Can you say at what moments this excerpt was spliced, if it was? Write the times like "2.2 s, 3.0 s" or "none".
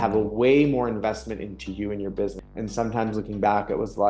2.5 s